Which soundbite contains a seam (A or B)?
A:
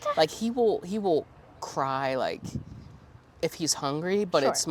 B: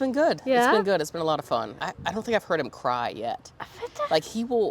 B